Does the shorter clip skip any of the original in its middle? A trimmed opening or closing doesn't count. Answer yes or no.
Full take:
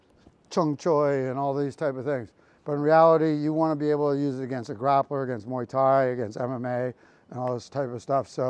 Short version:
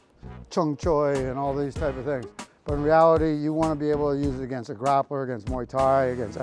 no